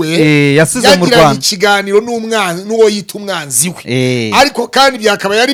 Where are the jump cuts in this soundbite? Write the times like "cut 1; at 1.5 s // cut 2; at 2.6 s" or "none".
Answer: none